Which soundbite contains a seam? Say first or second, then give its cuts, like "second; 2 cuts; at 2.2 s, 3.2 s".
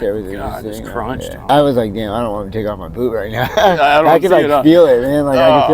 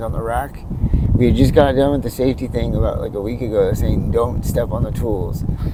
first; 1 cut; at 1.5 s